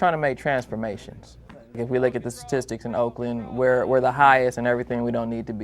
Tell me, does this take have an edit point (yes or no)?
yes